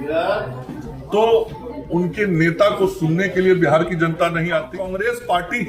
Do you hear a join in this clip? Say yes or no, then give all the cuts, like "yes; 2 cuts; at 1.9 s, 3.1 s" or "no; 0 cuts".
yes; 1 cut; at 4.8 s